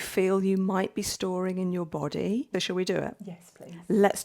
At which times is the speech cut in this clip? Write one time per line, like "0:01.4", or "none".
0:02.5